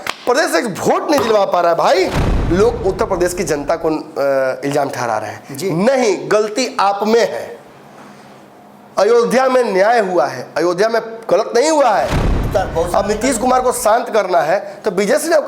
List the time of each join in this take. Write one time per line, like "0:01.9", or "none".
0:02.3
0:12.3